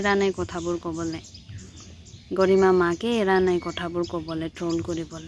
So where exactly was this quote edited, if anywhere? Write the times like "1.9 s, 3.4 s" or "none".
none